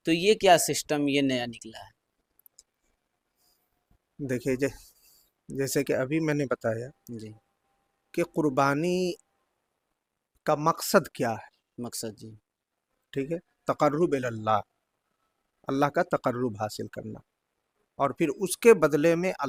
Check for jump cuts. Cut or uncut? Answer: uncut